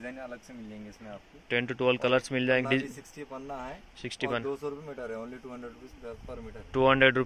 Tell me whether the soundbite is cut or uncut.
uncut